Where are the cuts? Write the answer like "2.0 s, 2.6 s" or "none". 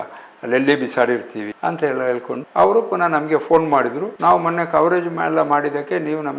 1.4 s, 2.5 s